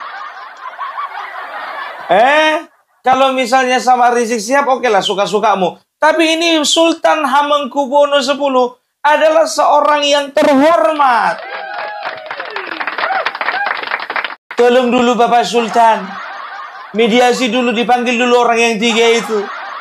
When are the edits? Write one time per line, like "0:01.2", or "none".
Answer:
0:14.4